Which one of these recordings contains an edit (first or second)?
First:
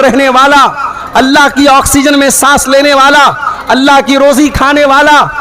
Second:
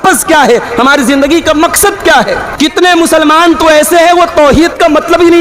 second